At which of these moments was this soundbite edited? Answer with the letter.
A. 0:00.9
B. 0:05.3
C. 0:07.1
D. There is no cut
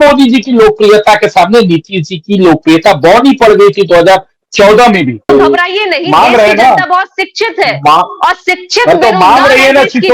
B